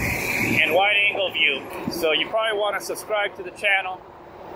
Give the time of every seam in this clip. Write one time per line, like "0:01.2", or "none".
0:01.7